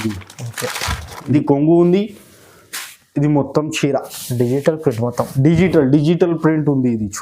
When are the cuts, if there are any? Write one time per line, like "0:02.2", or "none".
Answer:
0:01.3